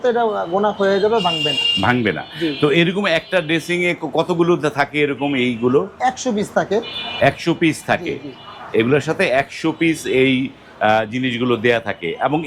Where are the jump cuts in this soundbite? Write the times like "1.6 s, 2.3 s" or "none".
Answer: none